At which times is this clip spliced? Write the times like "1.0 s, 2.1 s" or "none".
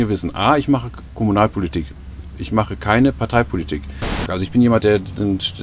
4.2 s

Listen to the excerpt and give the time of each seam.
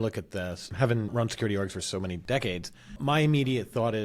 1.1 s, 2.2 s, 3.0 s

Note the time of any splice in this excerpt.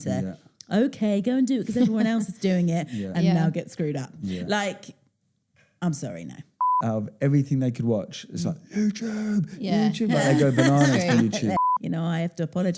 6.8 s, 11.7 s

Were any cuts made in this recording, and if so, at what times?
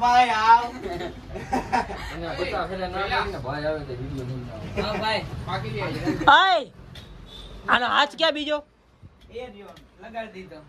none

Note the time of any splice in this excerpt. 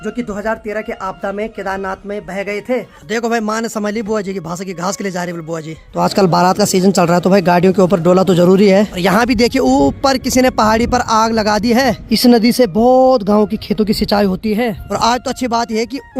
2.9 s, 5.9 s, 8.9 s, 12.0 s, 14.8 s

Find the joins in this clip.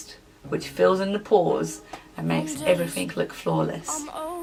none

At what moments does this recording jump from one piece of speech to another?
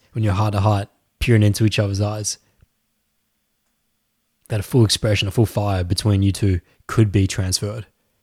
none

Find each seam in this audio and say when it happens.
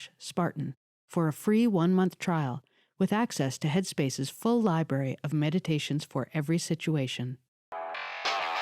7.6 s

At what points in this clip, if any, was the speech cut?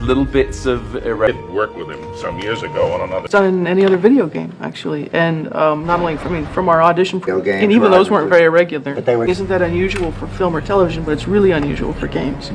1.3 s, 3.3 s, 7.3 s, 9.3 s

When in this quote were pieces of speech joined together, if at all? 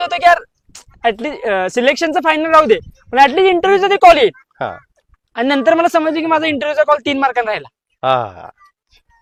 none

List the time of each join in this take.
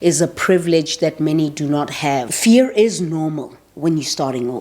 2.3 s

